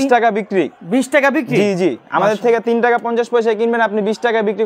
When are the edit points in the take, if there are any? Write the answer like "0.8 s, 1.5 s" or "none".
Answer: none